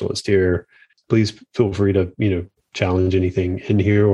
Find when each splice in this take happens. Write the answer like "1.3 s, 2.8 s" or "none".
0.9 s